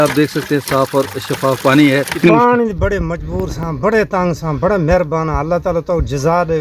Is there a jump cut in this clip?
yes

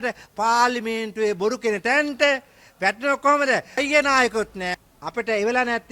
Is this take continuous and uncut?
no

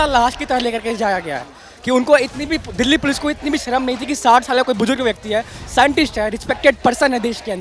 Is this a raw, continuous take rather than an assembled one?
yes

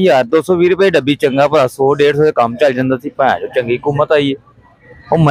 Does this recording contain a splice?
no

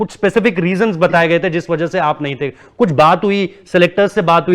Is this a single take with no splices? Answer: yes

